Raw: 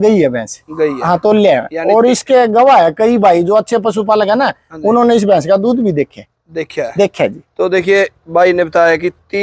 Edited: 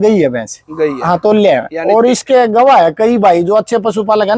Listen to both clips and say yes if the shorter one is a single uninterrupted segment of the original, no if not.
yes